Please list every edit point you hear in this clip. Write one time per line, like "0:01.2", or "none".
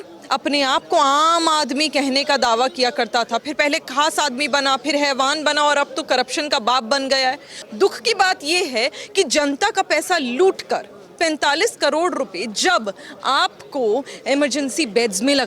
0:07.5